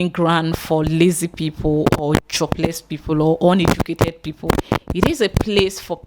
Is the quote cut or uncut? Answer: uncut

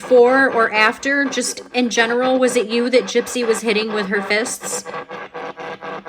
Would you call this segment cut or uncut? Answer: uncut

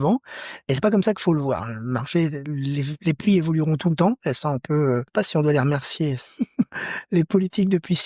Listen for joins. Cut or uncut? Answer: cut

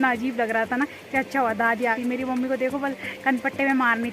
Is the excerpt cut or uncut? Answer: cut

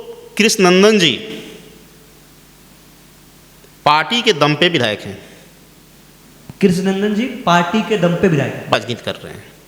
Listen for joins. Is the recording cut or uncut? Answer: uncut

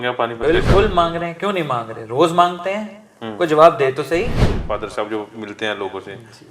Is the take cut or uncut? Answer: cut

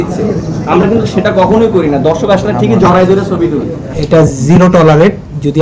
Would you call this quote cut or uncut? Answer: cut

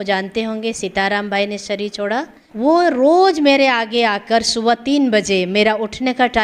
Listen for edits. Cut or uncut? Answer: cut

